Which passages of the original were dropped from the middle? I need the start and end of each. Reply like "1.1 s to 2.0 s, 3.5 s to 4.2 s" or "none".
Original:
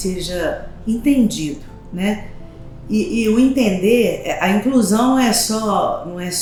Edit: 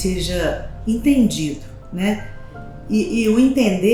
none